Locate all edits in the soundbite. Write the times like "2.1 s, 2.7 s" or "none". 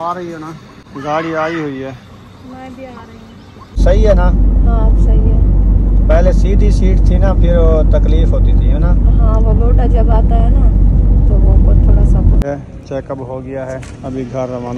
0.8 s, 3.8 s, 12.4 s